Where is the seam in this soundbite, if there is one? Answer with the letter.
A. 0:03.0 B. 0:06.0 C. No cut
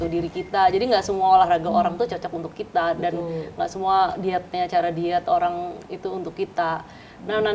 C